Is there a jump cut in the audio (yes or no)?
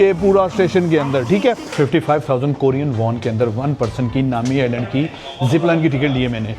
yes